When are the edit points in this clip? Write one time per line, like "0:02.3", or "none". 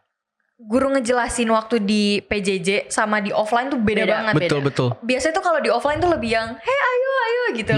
none